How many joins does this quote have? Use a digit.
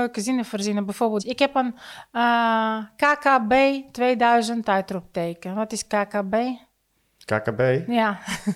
1